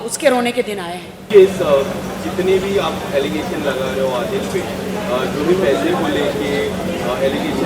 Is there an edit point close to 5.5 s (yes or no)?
no